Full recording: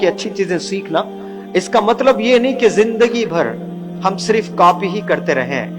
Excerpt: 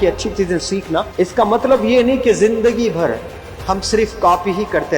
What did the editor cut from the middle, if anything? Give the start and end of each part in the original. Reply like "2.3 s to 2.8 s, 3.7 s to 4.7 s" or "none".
1.1 s to 1.4 s